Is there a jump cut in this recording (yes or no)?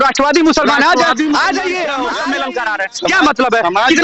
yes